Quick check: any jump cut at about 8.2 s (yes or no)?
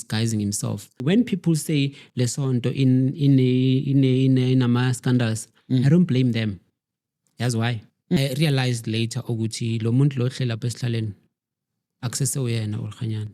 yes